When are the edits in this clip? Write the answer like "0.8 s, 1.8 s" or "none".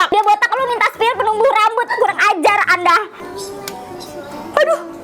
3.2 s